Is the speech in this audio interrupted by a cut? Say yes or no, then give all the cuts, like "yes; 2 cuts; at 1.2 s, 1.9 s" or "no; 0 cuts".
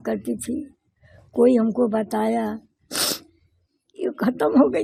no; 0 cuts